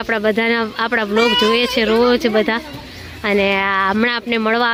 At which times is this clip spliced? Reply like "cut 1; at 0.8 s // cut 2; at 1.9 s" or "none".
none